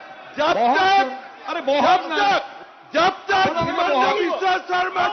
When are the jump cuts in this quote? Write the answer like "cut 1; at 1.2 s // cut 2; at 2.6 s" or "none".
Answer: none